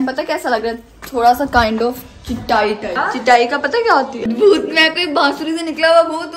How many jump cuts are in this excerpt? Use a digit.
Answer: 2